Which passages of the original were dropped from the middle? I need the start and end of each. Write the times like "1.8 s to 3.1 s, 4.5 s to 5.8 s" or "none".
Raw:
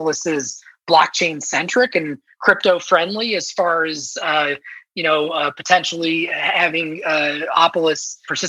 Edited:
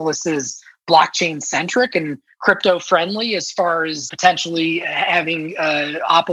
4.1 s to 5.6 s